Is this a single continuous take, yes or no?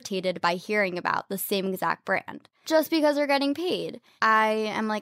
no